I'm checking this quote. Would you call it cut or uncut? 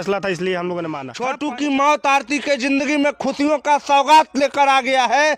cut